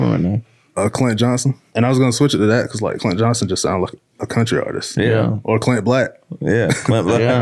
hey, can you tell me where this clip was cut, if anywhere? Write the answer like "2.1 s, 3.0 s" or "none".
1.6 s, 5.4 s